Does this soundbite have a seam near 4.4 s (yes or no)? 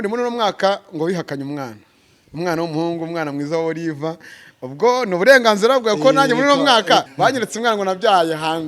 no